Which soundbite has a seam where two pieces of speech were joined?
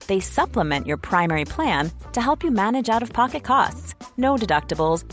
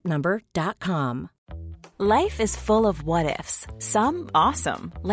second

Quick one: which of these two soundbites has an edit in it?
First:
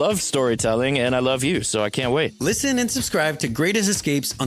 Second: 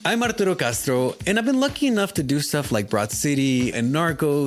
first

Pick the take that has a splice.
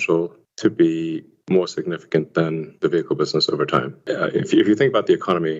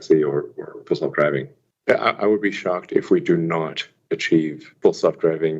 second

